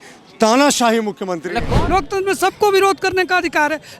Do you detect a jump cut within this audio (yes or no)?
yes